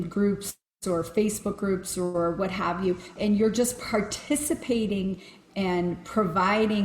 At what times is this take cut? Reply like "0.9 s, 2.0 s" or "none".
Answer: 3.2 s